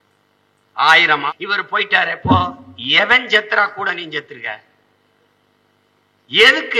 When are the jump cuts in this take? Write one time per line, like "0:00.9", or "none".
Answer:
0:01.3